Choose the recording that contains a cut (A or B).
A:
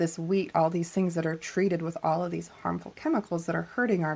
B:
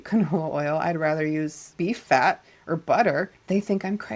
B